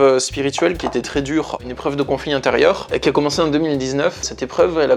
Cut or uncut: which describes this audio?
uncut